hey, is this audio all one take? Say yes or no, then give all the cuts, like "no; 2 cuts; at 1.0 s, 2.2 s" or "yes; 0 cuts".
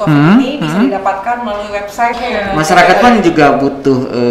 no; 1 cut; at 2.2 s